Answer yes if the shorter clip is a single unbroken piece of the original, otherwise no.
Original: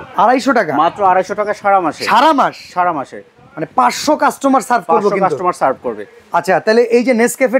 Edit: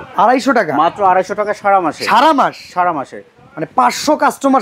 yes